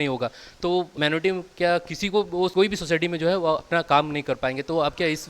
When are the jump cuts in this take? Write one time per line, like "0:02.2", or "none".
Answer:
0:00.9
0:02.5